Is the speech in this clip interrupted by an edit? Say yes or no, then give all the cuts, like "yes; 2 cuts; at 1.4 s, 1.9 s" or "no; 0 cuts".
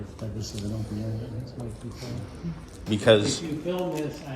yes; 1 cut; at 2.7 s